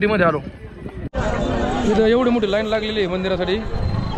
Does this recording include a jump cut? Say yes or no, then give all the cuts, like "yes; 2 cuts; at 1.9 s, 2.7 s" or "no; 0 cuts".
yes; 1 cut; at 1.0 s